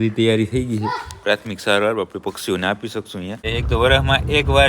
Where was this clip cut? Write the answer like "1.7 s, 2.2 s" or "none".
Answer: 3.5 s